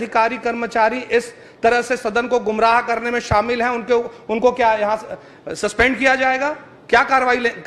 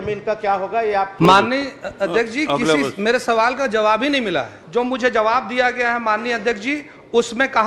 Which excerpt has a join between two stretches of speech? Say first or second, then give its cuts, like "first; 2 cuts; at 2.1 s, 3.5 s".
second; 2 cuts; at 1.2 s, 4.6 s